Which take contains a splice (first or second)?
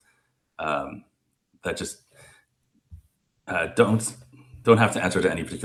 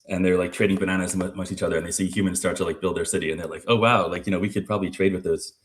second